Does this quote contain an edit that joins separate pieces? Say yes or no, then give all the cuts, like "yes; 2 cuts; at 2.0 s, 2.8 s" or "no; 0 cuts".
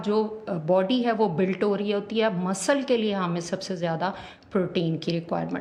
no; 0 cuts